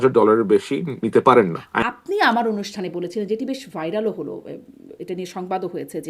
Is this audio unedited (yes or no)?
no